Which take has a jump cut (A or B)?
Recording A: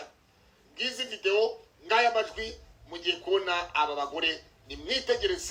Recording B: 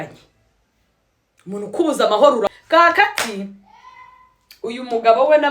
B